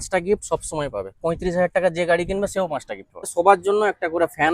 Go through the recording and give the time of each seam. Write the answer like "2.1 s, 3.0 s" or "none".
3.3 s